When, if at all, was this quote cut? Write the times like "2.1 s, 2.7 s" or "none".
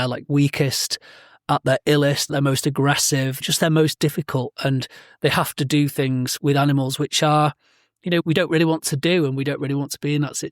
1.4 s, 2.2 s, 3.4 s, 6.4 s, 8.2 s